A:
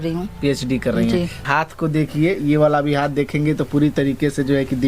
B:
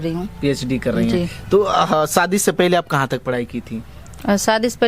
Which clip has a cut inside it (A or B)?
A